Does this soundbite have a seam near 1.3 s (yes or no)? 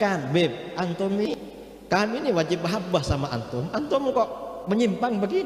yes